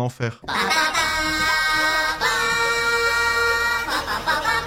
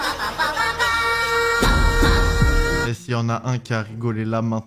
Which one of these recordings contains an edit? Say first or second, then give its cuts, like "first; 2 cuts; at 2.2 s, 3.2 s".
second; 1 cut; at 2.9 s